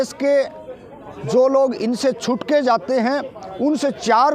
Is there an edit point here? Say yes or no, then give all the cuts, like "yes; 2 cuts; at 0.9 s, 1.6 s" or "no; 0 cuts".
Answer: no; 0 cuts